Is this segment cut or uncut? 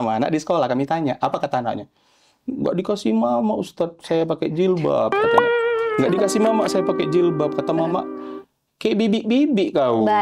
uncut